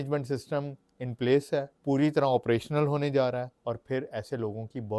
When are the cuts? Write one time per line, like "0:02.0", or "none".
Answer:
0:01.7
0:03.5